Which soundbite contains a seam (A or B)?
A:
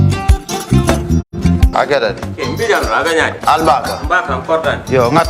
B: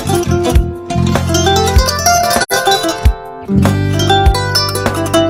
A